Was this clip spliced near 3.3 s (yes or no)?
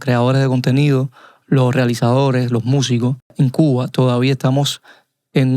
yes